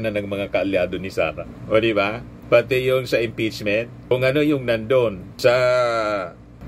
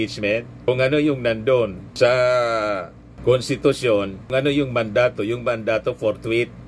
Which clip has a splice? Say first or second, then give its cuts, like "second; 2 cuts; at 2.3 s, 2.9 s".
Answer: first; 1 cut; at 1.5 s